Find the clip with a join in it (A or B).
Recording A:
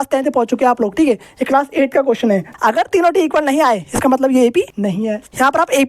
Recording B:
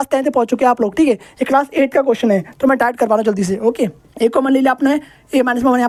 A